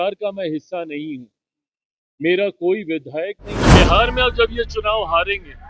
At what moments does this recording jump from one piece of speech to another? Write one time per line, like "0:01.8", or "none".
0:03.5